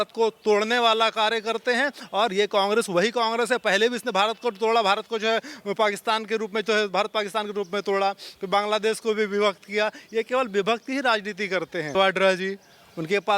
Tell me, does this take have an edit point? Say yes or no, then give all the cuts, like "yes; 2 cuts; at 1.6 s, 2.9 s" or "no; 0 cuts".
yes; 1 cut; at 12.0 s